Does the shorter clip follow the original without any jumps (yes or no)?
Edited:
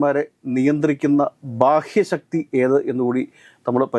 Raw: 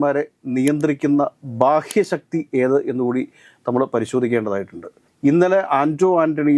yes